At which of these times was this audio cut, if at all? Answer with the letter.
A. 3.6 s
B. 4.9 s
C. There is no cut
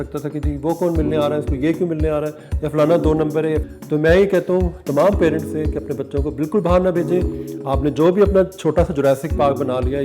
A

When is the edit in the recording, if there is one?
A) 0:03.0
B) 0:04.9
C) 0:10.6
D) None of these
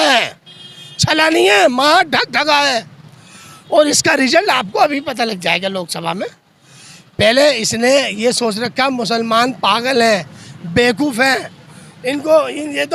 D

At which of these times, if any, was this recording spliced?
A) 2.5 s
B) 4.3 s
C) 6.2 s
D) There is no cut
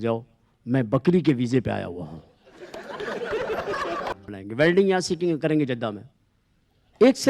B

